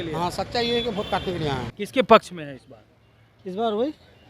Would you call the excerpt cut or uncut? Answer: cut